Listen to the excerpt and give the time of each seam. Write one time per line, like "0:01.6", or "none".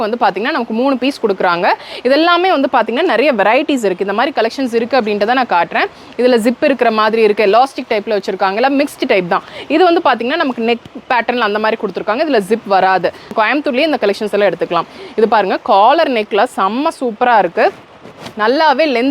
0:13.3